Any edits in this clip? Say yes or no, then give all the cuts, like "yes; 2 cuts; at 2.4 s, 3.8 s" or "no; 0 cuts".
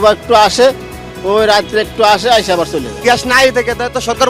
yes; 1 cut; at 2.9 s